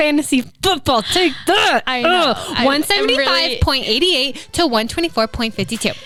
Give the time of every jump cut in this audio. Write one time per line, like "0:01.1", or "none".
none